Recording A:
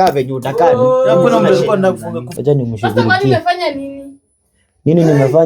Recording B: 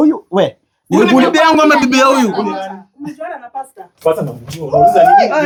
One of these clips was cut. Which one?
A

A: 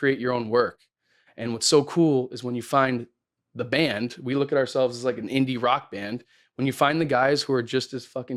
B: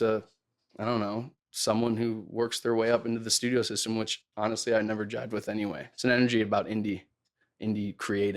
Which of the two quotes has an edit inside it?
B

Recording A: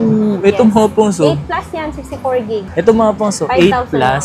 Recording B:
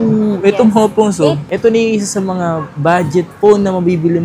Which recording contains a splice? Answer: B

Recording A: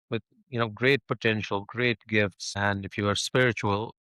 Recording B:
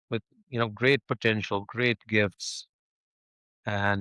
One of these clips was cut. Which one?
A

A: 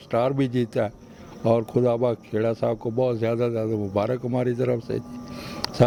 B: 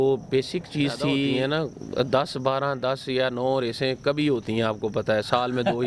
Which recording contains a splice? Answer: B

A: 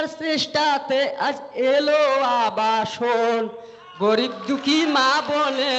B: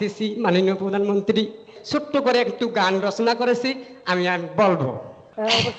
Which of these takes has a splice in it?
B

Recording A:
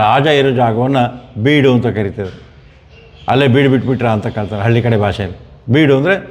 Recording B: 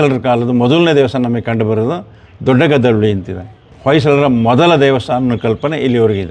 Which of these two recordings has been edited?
B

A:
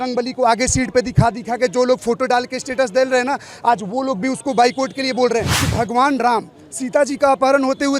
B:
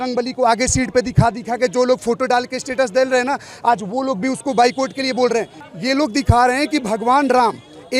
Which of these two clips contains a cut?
A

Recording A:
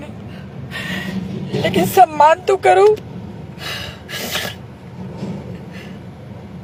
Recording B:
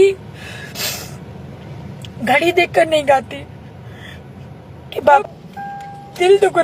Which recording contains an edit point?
B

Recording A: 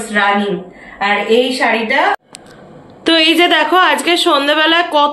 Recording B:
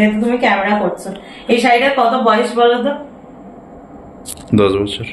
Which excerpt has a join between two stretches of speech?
A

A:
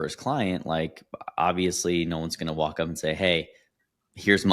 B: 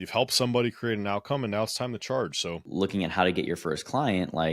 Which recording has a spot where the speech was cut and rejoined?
B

